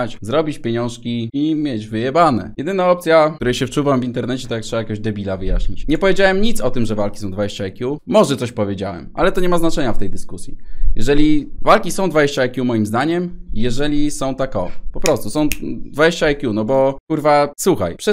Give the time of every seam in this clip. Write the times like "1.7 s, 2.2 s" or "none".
none